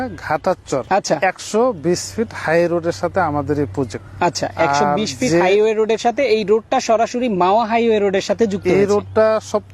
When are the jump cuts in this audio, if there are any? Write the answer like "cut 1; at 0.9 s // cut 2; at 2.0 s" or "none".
cut 1; at 0.8 s // cut 2; at 4.0 s